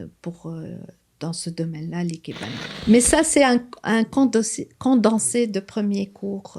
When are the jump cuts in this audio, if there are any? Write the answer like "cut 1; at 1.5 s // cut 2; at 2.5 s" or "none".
cut 1; at 2.7 s